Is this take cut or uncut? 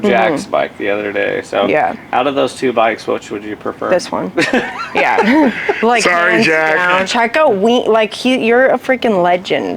cut